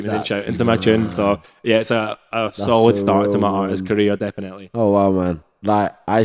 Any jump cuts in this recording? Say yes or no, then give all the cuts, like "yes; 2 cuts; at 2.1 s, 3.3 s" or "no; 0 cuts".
no; 0 cuts